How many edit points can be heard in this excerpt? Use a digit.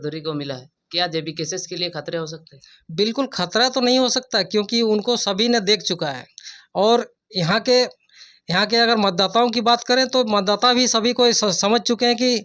0